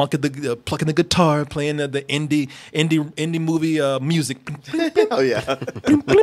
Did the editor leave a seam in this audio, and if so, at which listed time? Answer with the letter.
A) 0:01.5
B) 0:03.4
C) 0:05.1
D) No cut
D